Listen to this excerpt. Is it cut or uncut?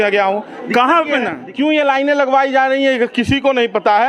cut